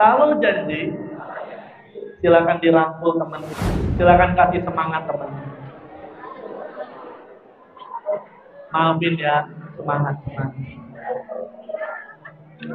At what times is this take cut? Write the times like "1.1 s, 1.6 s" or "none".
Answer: none